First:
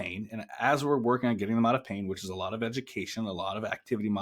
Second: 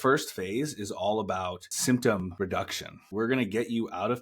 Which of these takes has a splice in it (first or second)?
second